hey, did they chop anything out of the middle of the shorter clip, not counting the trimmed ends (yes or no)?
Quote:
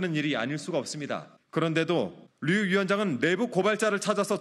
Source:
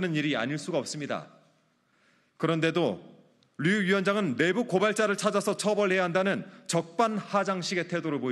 yes